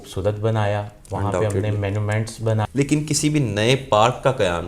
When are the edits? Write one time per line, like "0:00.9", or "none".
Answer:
0:02.6

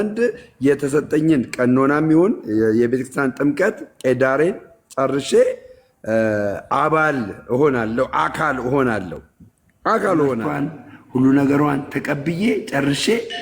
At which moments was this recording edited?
0:10.5

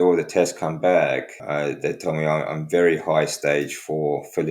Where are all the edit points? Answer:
0:01.3

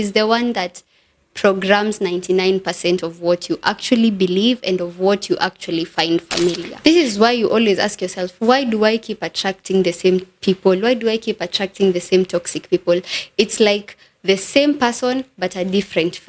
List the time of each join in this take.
0:06.7

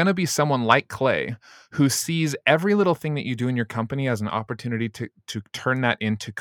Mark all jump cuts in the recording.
none

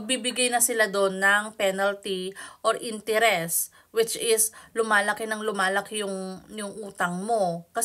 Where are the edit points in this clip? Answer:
none

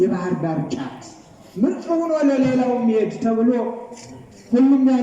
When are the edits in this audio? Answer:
none

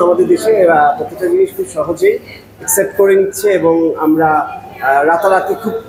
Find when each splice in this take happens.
none

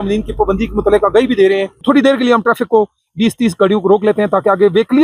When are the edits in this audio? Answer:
0:01.7

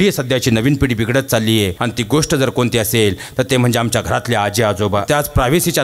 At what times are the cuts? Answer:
0:01.8
0:05.0

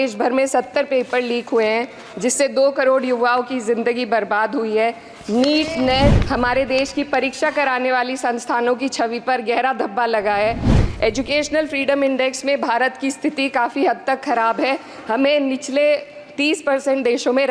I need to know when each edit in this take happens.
0:06.2
0:10.7

